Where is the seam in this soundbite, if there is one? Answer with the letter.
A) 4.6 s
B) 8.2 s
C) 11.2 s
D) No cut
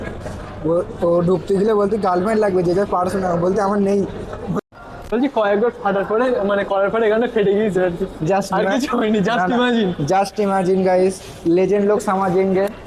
A